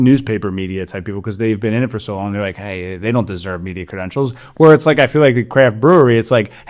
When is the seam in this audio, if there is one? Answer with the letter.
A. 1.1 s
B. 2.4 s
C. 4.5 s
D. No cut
D